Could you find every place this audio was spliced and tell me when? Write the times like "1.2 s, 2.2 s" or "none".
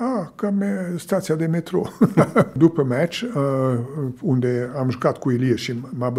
2.5 s